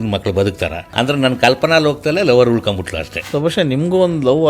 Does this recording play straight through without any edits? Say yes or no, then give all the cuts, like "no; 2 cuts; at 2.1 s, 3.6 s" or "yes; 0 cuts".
no; 2 cuts; at 0.9 s, 3.1 s